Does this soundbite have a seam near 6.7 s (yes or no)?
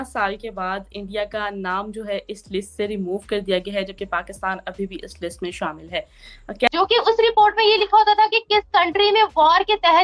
yes